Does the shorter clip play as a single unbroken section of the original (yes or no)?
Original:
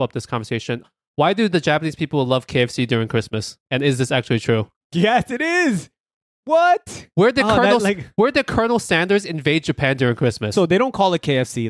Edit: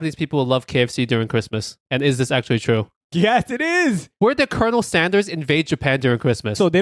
no